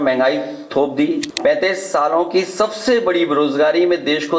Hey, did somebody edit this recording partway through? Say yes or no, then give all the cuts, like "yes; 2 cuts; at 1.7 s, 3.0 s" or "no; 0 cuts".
yes; 1 cut; at 1.3 s